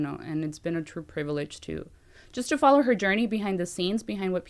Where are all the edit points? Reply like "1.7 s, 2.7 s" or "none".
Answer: none